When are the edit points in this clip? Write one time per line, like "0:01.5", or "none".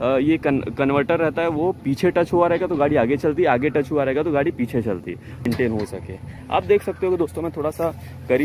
0:05.5